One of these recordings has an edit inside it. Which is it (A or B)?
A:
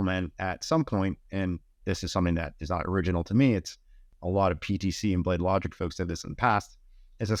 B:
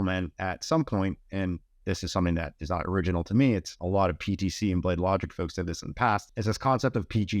B